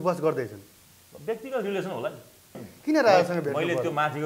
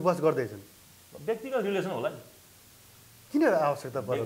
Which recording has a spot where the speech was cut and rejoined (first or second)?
first